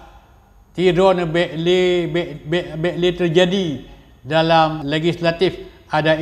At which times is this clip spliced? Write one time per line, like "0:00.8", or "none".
0:04.8